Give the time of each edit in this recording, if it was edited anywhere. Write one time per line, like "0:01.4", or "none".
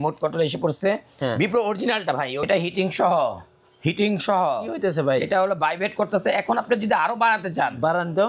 0:02.5